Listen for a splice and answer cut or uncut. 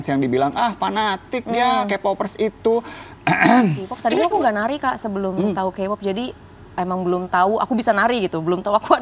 cut